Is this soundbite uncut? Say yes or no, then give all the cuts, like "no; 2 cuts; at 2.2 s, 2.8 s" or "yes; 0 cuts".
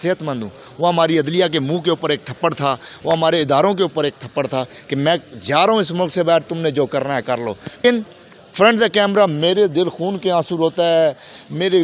no; 1 cut; at 7.8 s